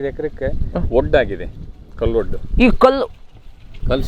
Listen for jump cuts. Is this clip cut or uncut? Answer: uncut